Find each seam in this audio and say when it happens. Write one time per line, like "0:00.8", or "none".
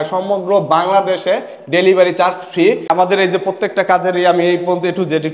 0:02.8